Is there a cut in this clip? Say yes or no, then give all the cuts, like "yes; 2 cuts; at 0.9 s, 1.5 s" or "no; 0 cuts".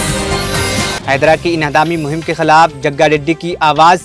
no; 0 cuts